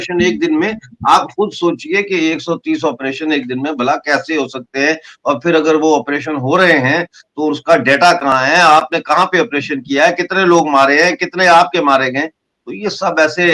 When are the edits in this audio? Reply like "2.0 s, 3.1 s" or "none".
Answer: none